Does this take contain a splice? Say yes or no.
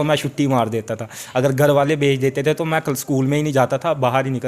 no